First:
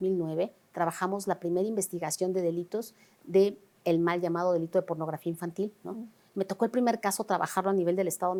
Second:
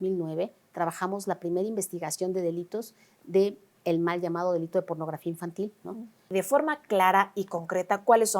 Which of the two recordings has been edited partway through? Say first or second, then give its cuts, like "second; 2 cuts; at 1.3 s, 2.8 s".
second; 1 cut; at 6.2 s